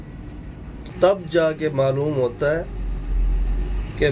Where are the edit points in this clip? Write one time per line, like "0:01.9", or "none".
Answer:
0:00.9

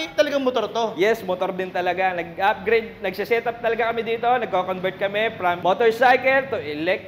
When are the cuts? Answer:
none

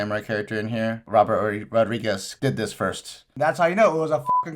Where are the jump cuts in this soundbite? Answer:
0:01.0
0:02.3
0:03.3

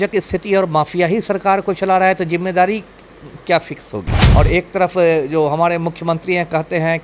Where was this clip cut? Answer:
0:04.1

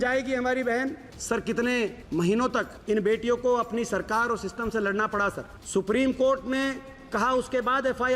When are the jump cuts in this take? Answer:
0:01.1
0:02.4
0:05.5

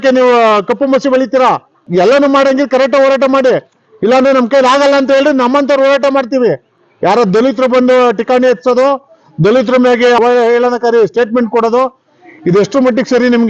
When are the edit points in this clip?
none

